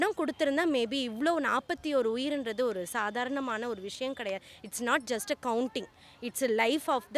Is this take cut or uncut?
uncut